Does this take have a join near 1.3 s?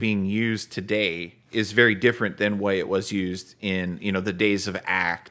yes; 1 cut; at 1.3 s

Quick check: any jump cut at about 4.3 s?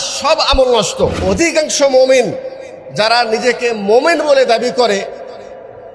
no; 1 cut; at 1.2 s

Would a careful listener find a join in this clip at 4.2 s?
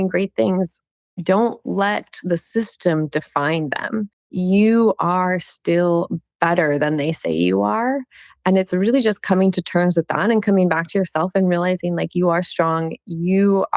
yes; 1 cut; at 4.2 s

